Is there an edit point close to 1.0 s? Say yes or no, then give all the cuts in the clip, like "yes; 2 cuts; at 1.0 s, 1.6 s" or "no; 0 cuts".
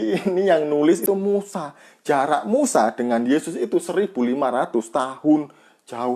yes; 1 cut; at 1.0 s